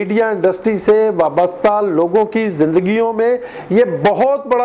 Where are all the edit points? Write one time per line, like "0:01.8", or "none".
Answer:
none